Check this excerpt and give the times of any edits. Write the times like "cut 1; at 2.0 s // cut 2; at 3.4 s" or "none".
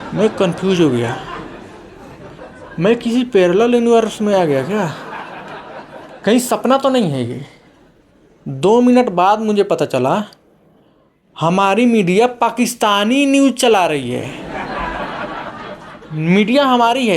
cut 1; at 14.3 s // cut 2; at 16.0 s